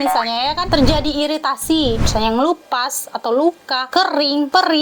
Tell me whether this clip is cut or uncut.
uncut